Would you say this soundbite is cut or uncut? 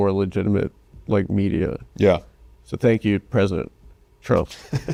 uncut